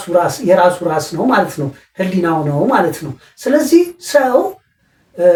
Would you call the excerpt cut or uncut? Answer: uncut